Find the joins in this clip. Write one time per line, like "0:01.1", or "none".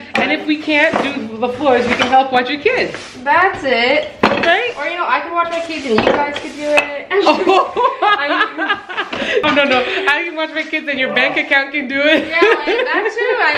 0:09.4